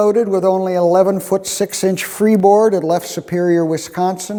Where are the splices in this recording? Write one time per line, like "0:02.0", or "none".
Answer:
none